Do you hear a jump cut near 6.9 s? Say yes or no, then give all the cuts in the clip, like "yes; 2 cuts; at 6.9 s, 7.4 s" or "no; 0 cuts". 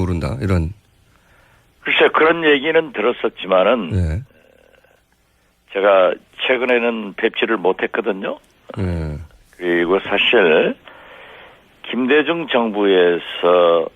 no; 1 cut; at 10.5 s